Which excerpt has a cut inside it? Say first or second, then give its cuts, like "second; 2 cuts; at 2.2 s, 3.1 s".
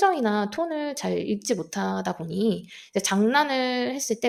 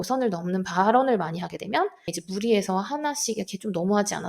second; 1 cut; at 2.2 s